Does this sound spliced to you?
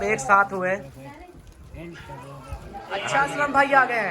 yes; 1 cut; at 3.1 s

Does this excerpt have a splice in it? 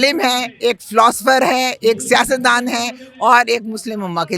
no; 0 cuts

